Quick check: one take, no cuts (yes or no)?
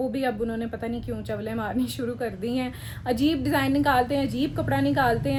yes